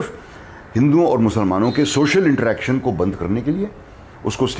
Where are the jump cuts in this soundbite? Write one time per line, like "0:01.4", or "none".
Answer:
none